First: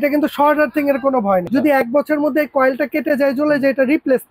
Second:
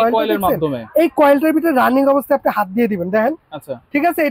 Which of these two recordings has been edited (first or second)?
first